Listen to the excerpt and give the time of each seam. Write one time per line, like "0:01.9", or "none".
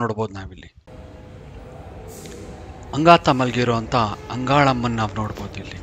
0:00.9
0:02.9